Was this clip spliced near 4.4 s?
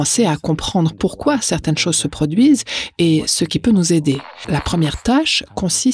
yes; 1 cut; at 4.4 s

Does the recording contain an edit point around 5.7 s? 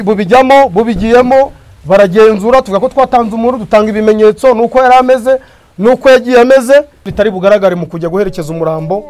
no; 1 cut; at 7.0 s

